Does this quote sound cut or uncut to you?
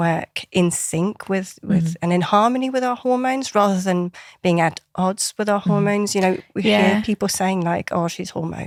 uncut